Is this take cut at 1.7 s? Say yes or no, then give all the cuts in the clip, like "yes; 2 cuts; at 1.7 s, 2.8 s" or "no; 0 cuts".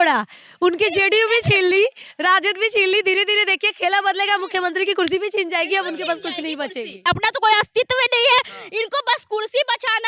no; 1 cut; at 7.1 s